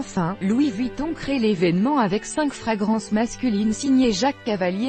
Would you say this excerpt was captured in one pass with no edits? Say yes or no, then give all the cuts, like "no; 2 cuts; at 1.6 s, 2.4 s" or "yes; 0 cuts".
yes; 0 cuts